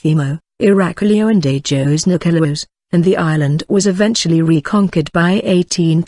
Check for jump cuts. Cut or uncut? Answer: cut